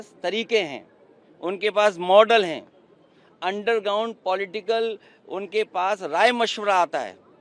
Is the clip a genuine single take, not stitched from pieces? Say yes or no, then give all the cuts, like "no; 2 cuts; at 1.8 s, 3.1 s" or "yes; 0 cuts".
yes; 0 cuts